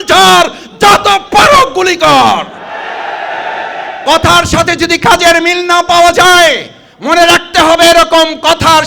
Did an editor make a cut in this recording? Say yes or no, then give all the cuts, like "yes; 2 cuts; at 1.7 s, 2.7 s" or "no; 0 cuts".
yes; 1 cut; at 3.5 s